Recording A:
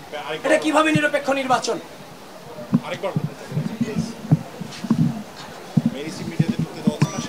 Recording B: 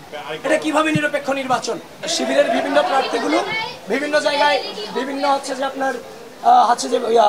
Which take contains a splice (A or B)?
B